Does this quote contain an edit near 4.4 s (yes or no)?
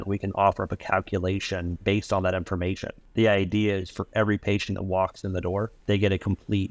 no